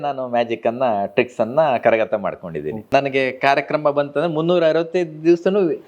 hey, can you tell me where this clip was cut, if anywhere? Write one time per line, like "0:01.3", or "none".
0:02.8